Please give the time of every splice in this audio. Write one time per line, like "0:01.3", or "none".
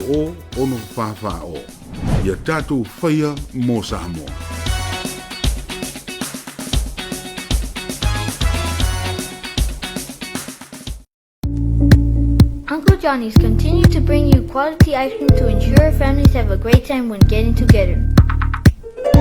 0:11.4